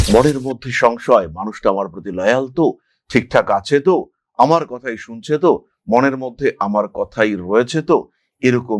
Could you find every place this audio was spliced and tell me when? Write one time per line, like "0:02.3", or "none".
none